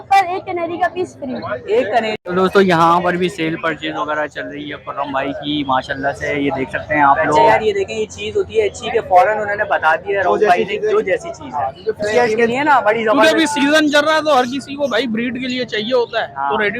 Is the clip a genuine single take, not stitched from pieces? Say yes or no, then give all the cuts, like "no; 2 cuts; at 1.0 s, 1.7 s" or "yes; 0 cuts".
no; 3 cuts; at 2.2 s, 7.5 s, 12.2 s